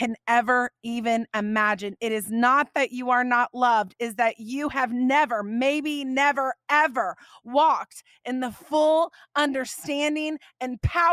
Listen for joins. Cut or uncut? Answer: uncut